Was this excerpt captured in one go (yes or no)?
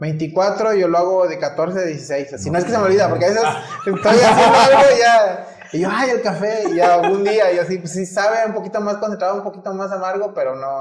yes